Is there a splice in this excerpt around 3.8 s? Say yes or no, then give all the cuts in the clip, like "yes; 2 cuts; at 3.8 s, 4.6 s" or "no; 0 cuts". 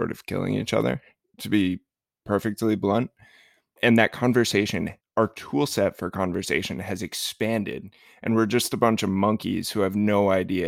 yes; 2 cuts; at 3.8 s, 5.0 s